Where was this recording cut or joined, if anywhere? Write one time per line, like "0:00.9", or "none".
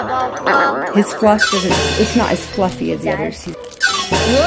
0:03.4